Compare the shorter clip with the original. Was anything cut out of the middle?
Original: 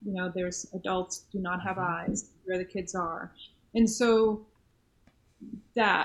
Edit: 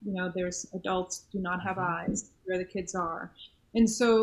no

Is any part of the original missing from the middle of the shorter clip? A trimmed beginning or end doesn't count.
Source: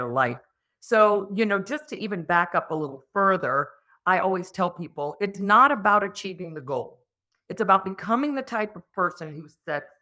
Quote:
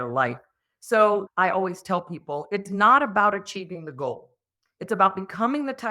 yes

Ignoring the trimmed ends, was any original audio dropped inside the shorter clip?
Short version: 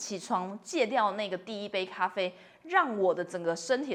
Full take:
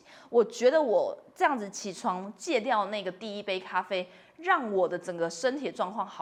no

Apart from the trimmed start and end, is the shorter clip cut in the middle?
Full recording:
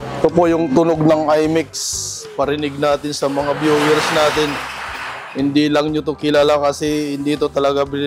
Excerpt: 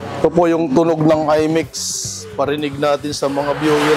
no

